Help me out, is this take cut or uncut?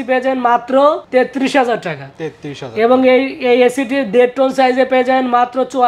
uncut